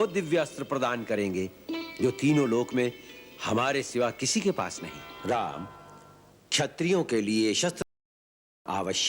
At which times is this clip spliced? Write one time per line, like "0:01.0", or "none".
0:05.1